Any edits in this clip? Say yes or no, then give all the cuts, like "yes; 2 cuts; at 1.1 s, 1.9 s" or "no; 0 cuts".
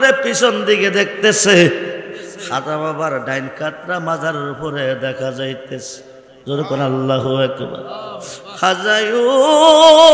no; 0 cuts